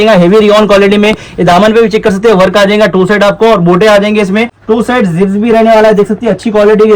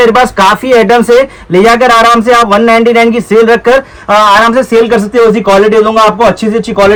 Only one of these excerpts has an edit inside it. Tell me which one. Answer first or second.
first